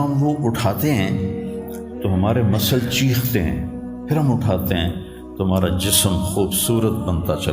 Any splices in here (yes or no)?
yes